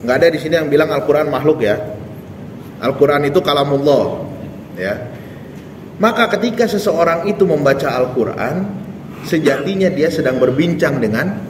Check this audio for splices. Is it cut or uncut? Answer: uncut